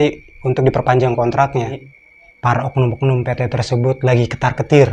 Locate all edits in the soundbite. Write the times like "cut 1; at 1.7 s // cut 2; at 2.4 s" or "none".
cut 1; at 1.8 s